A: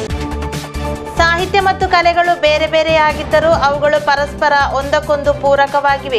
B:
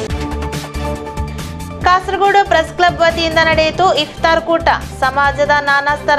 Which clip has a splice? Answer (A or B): B